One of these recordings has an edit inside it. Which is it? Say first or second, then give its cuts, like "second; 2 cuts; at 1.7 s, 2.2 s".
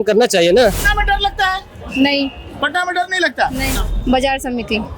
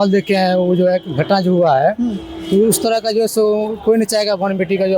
first; 2 cuts; at 0.8 s, 3.7 s